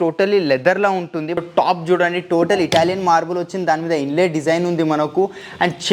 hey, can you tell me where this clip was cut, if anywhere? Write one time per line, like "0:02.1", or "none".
0:01.4

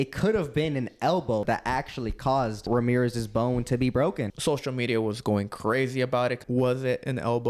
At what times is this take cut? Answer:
0:01.4
0:02.7
0:04.3
0:06.4

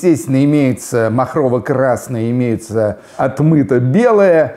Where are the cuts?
0:03.1

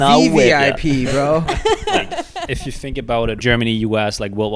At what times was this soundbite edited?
0:02.3
0:03.4

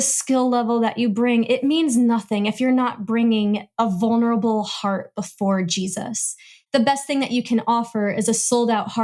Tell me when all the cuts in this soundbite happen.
0:06.5

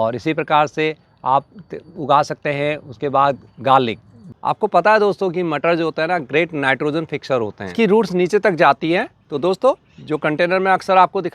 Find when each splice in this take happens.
0:04.3
0:07.7

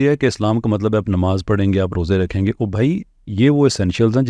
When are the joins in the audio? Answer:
none

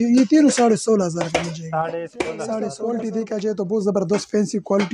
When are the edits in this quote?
0:02.7

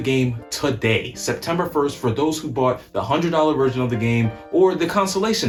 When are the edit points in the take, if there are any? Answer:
none

